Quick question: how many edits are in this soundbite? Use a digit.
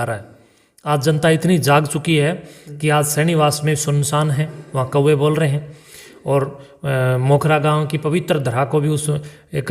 0